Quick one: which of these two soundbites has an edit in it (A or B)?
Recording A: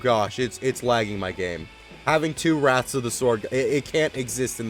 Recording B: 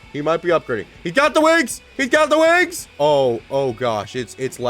B